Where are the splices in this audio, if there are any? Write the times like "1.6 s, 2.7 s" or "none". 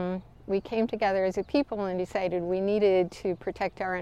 none